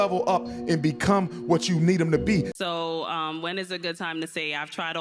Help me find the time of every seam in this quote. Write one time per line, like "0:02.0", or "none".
0:02.5